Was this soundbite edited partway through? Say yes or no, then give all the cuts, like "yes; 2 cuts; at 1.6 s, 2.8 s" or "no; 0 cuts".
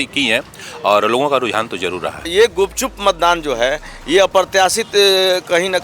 yes; 1 cut; at 2.3 s